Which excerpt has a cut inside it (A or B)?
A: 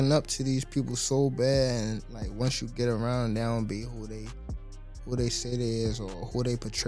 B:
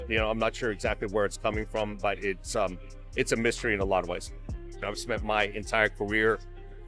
B